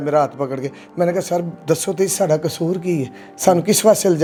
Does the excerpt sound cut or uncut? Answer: uncut